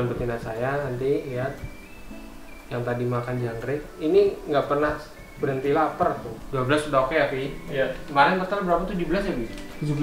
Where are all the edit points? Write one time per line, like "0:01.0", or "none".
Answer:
0:06.3